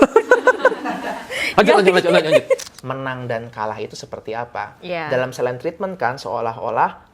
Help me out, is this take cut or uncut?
cut